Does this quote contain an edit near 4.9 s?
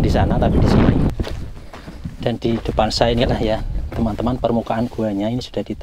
no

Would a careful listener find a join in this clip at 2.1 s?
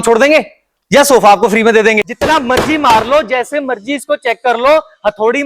yes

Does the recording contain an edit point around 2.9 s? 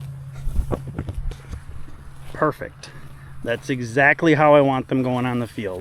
no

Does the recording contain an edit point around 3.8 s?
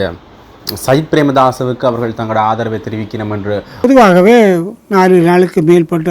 yes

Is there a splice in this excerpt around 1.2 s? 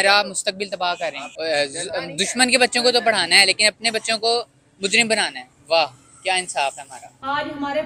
no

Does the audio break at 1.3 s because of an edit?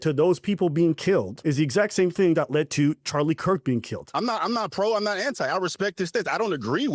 yes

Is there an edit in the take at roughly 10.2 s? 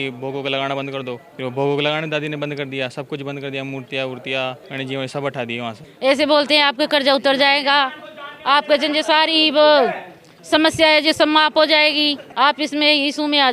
no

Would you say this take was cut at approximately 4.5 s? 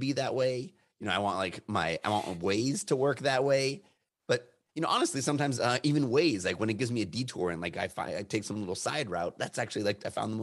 no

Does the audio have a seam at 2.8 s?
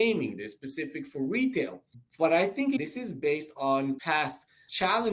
yes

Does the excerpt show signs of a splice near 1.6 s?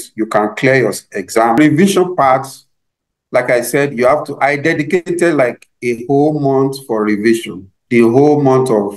yes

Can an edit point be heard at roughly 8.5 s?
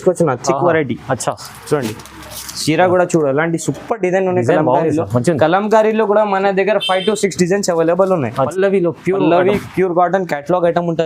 yes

